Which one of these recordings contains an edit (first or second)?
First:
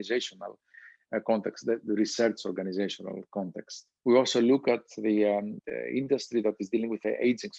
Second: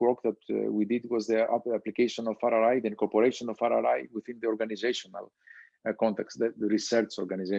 first